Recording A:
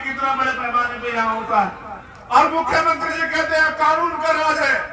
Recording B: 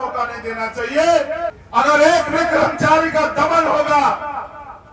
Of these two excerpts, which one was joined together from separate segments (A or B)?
B